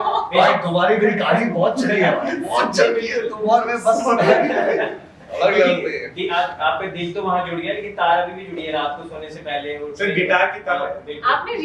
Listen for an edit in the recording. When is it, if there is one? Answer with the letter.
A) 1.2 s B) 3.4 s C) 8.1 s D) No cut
D